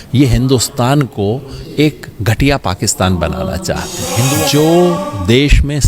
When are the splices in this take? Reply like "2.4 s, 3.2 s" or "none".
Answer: 4.2 s